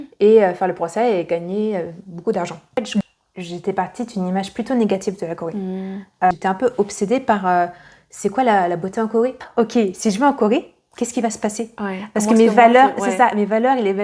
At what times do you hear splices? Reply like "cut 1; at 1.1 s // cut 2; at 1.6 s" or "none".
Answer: cut 1; at 3.0 s // cut 2; at 6.3 s // cut 3; at 9.5 s